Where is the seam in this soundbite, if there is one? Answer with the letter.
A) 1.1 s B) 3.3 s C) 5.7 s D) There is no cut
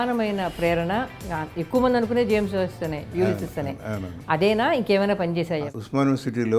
C